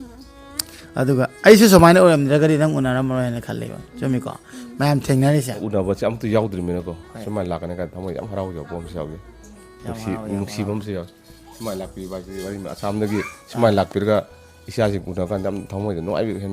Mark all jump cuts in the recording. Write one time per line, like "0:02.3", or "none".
0:05.6